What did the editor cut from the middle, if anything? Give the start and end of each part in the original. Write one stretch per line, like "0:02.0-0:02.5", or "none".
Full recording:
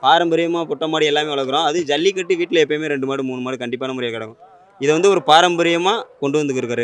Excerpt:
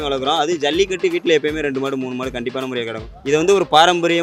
0:04.3-0:04.6